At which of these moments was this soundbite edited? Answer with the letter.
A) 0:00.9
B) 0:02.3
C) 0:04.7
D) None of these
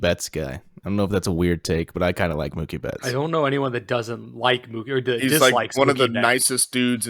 D